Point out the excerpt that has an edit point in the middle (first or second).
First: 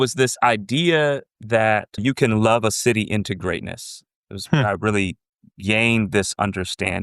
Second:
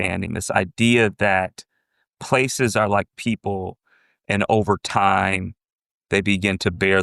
first